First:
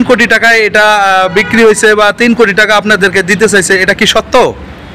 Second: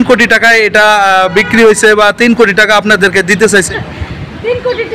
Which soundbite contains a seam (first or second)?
second